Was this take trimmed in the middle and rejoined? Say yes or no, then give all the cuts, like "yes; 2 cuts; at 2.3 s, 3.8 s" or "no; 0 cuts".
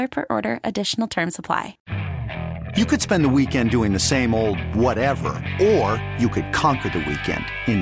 yes; 1 cut; at 1.8 s